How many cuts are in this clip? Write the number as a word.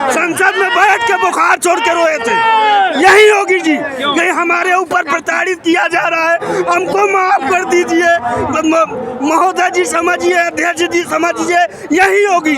zero